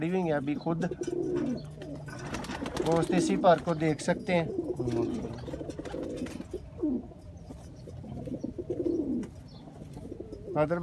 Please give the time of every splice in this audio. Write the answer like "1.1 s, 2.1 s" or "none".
none